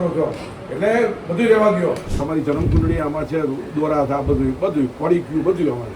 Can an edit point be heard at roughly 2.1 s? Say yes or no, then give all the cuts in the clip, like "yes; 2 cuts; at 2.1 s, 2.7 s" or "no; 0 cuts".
yes; 1 cut; at 2.1 s